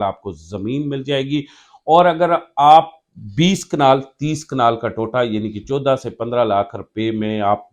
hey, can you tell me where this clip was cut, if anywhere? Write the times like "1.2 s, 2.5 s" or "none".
none